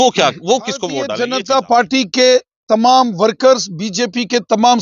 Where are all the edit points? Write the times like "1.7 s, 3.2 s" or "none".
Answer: 1.1 s